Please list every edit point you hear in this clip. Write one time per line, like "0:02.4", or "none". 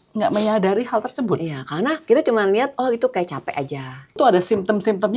0:02.0
0:04.2